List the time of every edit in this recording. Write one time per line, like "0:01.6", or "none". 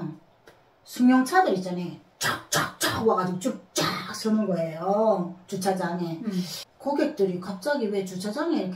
0:06.6